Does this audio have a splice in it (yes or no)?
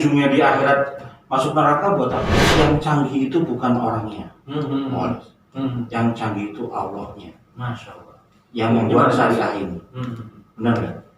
yes